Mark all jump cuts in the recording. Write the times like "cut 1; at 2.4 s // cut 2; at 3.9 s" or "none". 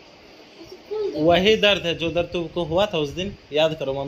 none